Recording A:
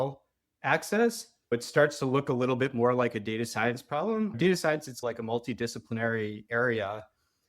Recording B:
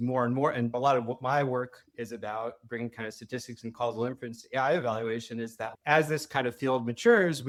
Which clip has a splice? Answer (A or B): A